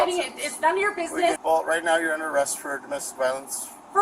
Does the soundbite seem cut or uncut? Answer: cut